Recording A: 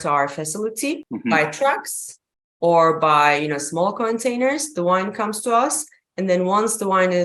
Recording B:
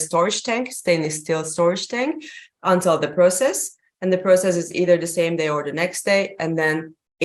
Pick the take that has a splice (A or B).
A